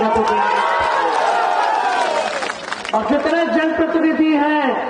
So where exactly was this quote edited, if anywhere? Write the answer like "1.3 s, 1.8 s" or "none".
none